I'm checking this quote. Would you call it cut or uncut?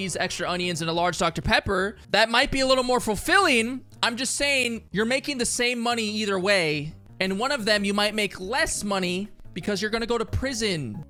uncut